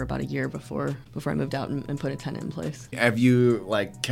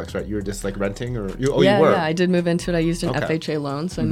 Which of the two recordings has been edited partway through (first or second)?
first